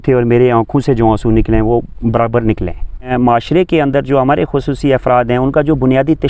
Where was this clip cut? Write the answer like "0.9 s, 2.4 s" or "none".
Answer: 3.0 s